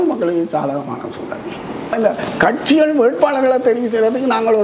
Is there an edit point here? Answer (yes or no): yes